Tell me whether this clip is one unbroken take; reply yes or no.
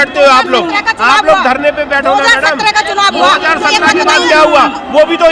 yes